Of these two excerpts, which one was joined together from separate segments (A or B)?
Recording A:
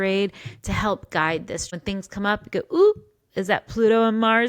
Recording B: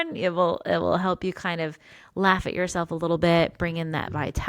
A